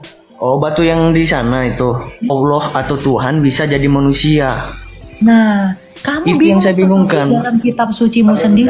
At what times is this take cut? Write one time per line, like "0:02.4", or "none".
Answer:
0:02.3